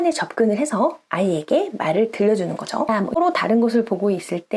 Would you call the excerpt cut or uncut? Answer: cut